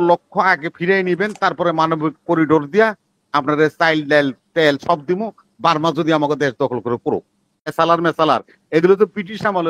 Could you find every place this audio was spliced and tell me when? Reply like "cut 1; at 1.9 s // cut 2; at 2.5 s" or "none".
cut 1; at 7.7 s

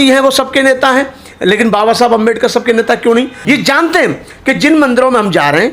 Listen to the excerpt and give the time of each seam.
cut 1; at 3.4 s

